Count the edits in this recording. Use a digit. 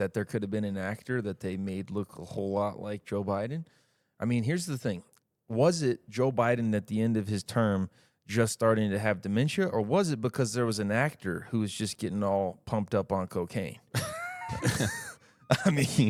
0